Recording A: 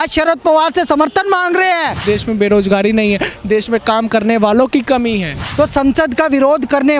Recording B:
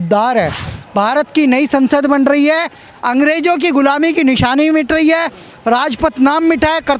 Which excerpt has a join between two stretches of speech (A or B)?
A